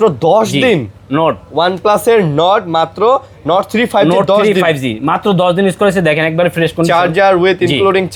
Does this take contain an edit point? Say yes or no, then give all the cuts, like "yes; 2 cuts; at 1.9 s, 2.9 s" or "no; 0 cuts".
no; 0 cuts